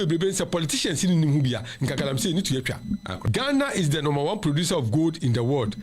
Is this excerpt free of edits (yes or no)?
no